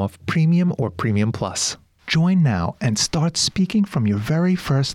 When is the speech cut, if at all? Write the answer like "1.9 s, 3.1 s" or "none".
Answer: 1.7 s